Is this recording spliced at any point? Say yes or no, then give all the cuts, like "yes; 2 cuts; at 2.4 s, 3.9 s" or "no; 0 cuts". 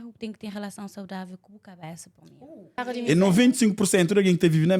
yes; 1 cut; at 2.8 s